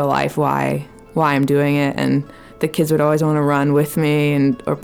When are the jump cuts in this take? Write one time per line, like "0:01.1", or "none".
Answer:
none